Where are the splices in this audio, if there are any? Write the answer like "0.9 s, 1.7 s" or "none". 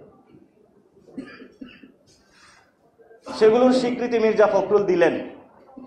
none